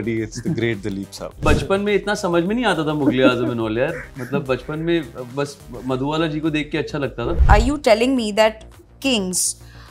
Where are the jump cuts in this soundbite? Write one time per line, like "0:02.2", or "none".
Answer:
0:01.4
0:07.4